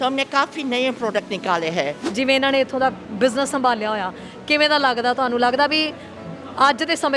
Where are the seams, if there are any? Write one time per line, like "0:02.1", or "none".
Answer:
0:02.0

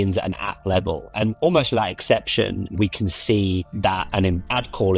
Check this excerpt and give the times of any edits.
0:02.7

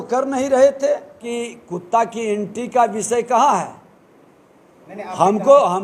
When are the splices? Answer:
0:01.3

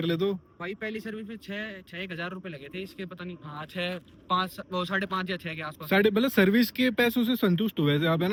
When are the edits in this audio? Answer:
none

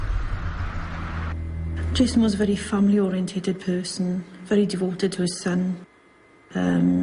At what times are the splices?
none

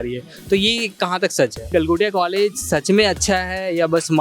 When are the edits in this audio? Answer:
0:01.7

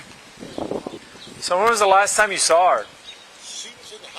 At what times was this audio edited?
0:01.1

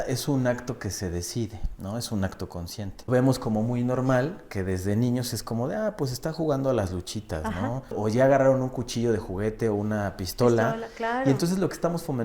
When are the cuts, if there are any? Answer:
0:03.1
0:08.0

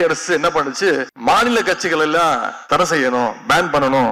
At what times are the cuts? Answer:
0:01.1
0:02.6

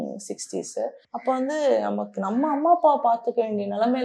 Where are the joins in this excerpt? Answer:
0:01.1

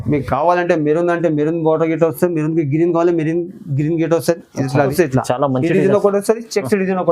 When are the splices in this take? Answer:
0:04.9

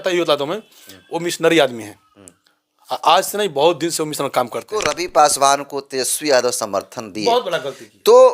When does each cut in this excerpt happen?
0:05.0

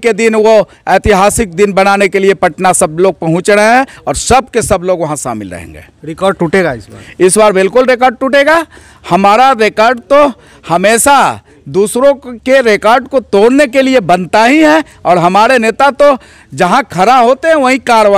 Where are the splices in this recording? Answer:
none

